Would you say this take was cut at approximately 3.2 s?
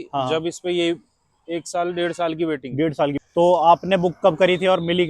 yes; 1 cut; at 3.2 s

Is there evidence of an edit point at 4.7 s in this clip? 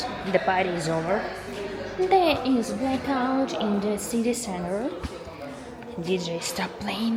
no; 0 cuts

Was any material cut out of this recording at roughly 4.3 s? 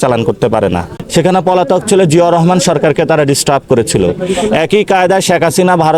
no; 1 cut; at 0.9 s

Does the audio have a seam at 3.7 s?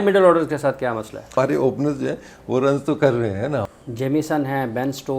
yes; 2 cuts; at 1.2 s, 3.7 s

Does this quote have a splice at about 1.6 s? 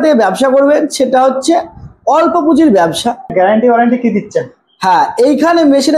no; 1 cut; at 3.3 s

